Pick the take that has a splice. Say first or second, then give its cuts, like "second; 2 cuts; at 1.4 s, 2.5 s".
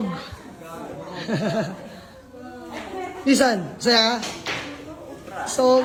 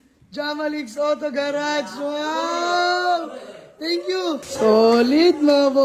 second; 1 cut; at 4.5 s